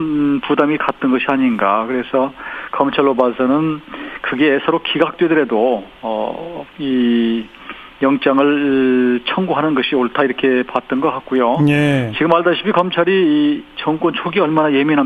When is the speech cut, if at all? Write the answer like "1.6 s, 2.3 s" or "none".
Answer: 2.4 s